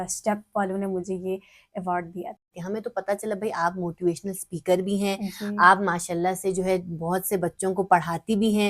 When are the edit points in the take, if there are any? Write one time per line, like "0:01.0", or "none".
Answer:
0:02.5